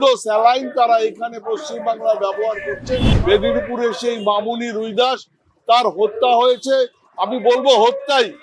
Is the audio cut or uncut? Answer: cut